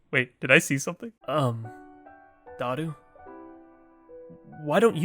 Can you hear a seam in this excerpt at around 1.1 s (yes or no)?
yes